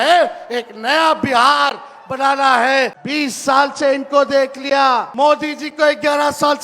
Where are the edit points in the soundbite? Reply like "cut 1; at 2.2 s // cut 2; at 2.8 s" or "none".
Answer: cut 1; at 3.0 s // cut 2; at 5.1 s